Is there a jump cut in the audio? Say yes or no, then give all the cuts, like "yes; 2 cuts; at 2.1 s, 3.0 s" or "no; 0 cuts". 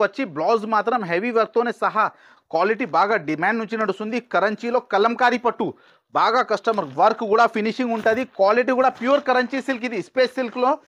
no; 0 cuts